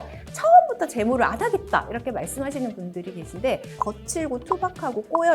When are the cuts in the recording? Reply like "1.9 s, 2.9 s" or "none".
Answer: 3.7 s

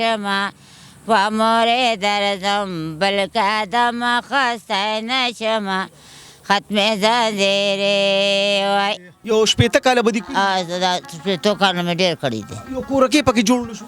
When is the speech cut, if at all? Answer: 9.1 s

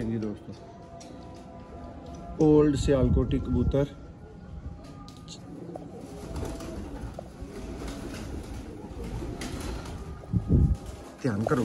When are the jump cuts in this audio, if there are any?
none

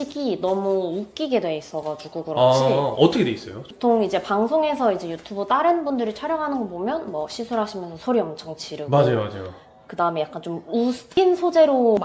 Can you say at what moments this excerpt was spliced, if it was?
none

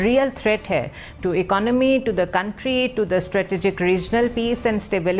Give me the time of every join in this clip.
none

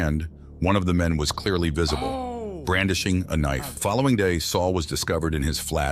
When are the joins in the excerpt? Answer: 3.8 s

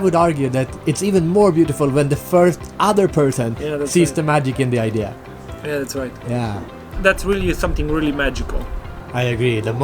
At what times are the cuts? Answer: none

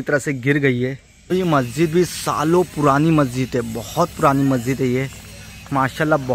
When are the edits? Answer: 1.1 s

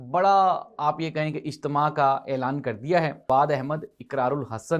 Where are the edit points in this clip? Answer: 3.3 s

